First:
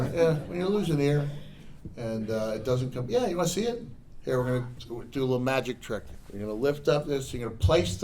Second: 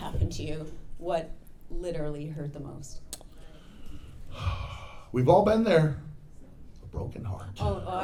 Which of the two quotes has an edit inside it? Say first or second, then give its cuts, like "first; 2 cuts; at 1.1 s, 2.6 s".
first; 1 cut; at 6.1 s